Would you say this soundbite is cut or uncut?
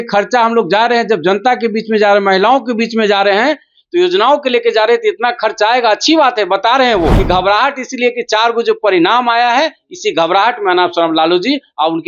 cut